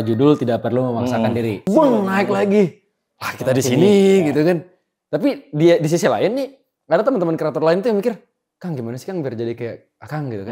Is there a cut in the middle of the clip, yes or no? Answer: yes